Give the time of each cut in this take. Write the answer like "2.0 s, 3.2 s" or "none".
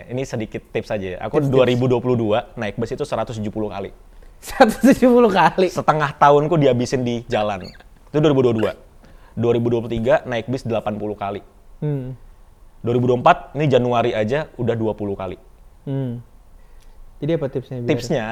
none